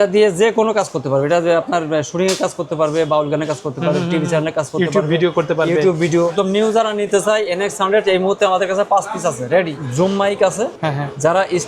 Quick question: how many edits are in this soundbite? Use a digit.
3